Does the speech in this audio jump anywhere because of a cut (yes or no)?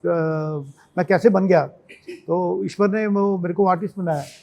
no